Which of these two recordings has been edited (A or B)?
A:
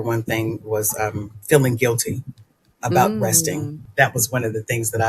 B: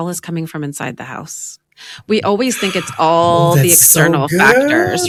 A